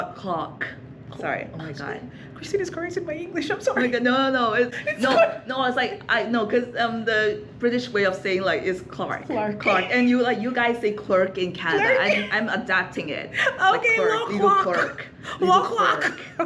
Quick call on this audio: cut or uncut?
uncut